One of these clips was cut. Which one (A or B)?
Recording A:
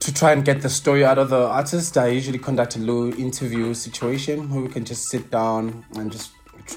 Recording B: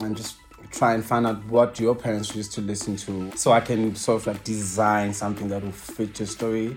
B